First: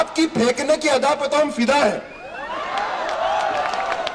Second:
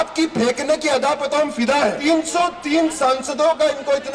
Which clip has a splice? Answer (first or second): second